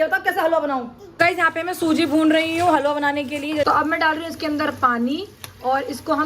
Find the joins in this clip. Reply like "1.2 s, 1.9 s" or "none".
1.0 s, 3.7 s